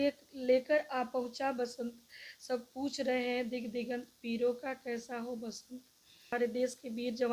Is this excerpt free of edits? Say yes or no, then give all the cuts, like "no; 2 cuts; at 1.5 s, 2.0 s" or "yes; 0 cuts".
no; 1 cut; at 6.3 s